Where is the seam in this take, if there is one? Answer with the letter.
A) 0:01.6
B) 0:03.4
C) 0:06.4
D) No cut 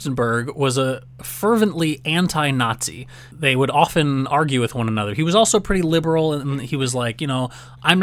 D